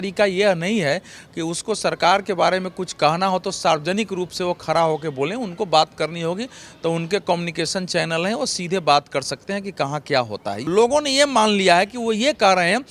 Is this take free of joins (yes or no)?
no